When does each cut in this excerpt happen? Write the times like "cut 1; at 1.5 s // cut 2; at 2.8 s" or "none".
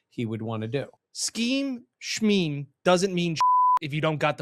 cut 1; at 1.0 s

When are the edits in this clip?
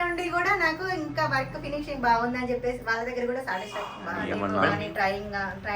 cut 1; at 4.3 s

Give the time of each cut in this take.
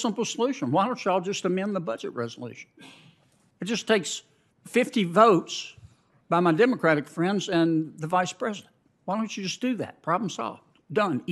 none

